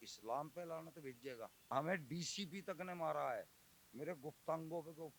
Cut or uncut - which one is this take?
cut